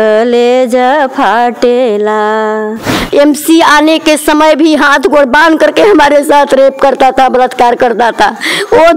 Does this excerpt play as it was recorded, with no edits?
no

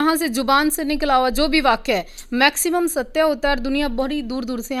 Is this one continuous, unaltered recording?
yes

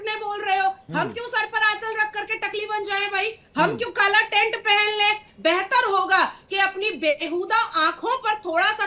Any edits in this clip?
yes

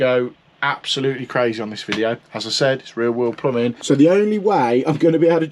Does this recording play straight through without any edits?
no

